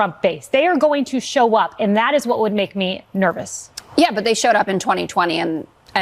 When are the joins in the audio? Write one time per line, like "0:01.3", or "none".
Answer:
none